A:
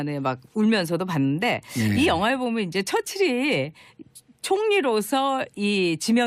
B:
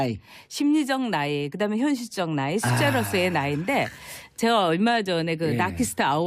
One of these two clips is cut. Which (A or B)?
B